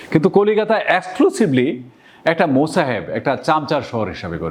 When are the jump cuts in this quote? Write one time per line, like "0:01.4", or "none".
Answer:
none